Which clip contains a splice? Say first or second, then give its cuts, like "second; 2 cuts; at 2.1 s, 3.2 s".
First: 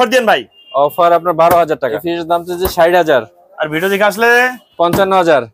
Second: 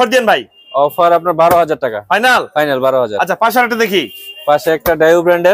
first; 1 cut; at 1.9 s